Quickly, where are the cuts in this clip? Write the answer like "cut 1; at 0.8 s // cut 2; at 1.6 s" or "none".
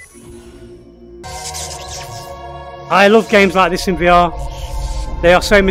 cut 1; at 1.2 s